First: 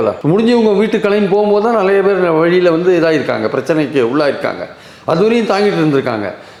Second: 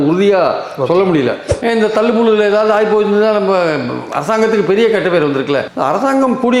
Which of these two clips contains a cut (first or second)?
second